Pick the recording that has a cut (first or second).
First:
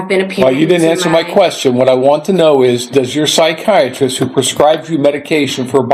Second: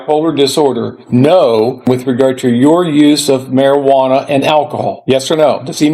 second